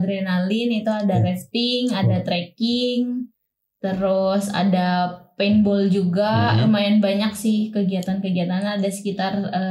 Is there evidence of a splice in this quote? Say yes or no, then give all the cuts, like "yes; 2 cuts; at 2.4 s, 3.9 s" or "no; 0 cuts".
no; 0 cuts